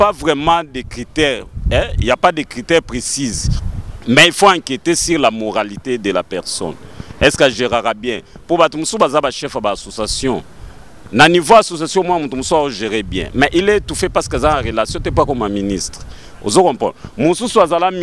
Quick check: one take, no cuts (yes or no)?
yes